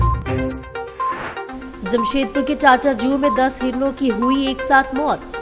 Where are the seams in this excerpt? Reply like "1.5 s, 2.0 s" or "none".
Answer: 1.5 s

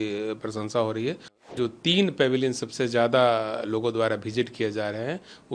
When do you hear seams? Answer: 1.4 s

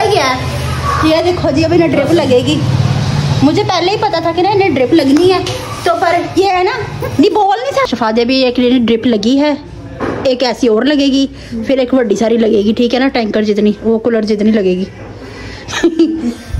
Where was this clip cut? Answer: 2.9 s, 7.9 s, 15.3 s

